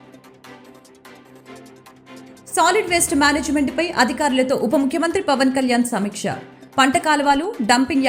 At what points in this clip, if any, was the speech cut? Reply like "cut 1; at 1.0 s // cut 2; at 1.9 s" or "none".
cut 1; at 2.5 s